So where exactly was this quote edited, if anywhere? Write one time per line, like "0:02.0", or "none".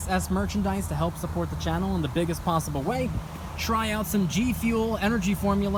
none